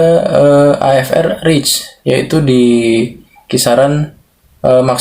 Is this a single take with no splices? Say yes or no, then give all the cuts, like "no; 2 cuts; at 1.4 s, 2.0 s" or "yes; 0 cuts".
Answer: yes; 0 cuts